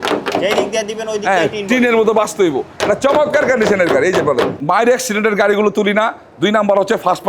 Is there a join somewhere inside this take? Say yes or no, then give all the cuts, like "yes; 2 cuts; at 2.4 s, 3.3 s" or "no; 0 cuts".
yes; 2 cuts; at 2.7 s, 4.6 s